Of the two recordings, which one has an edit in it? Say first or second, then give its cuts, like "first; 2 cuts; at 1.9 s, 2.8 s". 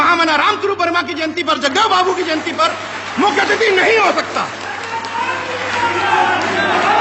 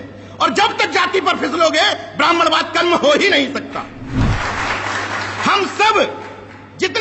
second; 1 cut; at 4.3 s